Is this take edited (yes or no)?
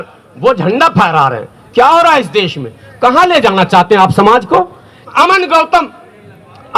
yes